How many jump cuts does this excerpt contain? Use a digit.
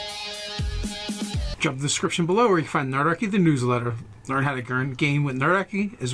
1